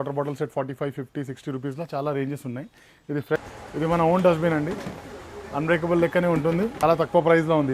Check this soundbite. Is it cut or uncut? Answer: cut